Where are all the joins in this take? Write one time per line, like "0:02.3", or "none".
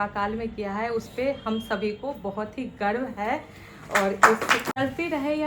none